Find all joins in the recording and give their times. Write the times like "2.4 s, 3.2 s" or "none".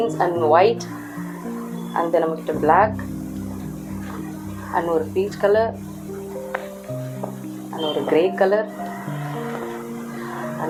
none

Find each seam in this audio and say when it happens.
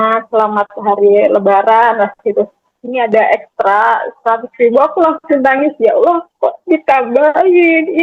none

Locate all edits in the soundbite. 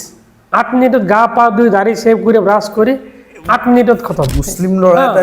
4.3 s

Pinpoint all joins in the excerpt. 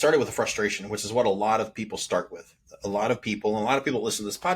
none

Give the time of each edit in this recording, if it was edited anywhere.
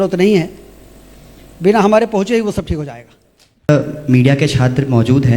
3.7 s

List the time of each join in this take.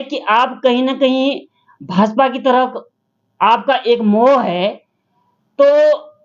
none

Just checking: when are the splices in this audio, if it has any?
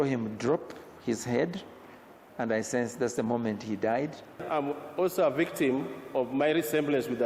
4.4 s

